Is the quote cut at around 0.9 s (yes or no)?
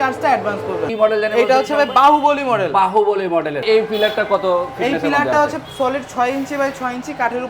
yes